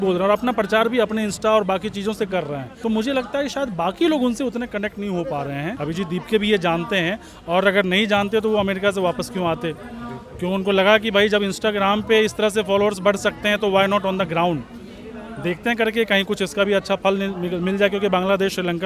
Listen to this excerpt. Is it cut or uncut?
cut